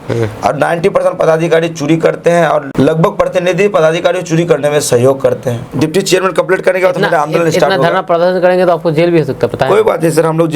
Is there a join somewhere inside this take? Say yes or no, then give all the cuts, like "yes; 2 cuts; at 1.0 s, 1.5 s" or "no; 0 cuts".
yes; 2 cuts; at 2.7 s, 5.6 s